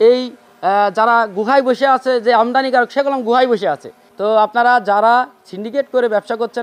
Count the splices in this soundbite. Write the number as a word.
zero